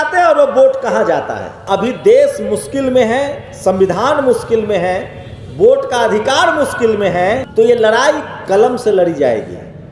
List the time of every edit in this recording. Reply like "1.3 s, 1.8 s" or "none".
1.5 s, 7.5 s